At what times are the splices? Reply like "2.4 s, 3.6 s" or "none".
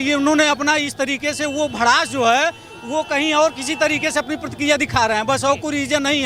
none